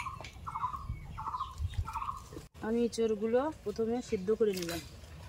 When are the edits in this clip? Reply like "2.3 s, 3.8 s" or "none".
2.4 s